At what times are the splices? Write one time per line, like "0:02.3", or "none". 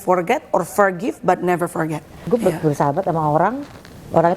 0:02.2

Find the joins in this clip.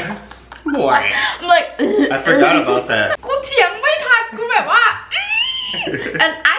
0:03.2

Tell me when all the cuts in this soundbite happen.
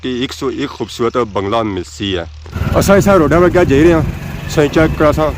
0:02.4

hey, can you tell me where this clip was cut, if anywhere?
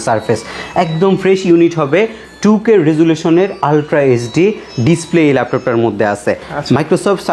none

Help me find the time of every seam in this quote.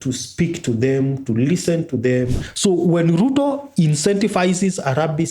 0:02.4

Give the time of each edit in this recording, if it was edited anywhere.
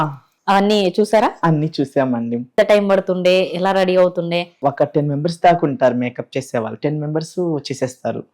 0:02.5
0:04.5

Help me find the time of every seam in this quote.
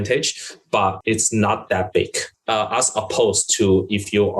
0:01.0
0:02.3

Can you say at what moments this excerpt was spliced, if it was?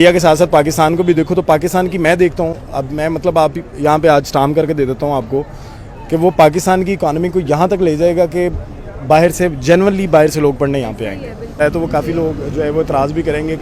0:11.6

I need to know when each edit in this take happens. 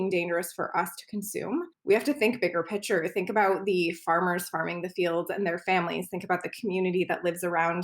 0:01.7

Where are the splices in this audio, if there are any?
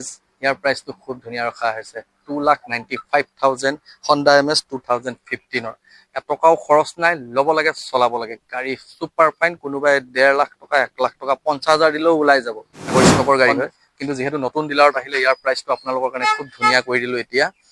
0:12.9

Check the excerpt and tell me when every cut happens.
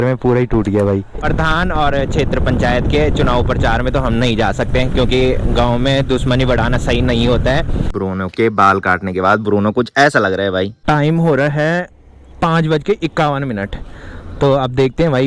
0:01.2
0:07.9
0:10.8

